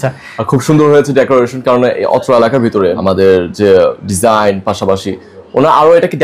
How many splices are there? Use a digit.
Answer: 1